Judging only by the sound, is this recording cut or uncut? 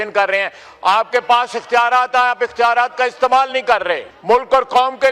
cut